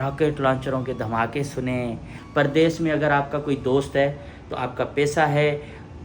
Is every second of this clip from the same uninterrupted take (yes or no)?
no